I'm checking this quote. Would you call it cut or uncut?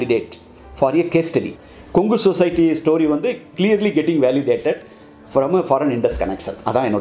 uncut